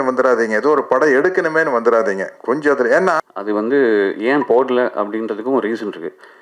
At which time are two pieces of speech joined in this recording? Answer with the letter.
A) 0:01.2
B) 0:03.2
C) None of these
B